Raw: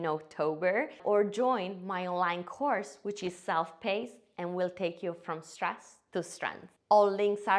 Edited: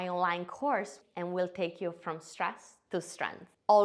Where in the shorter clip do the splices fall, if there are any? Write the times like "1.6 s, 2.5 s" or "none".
0.9 s